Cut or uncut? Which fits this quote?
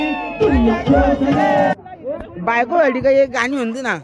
cut